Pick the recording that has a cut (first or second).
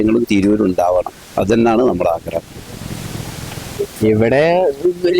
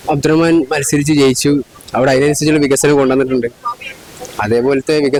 first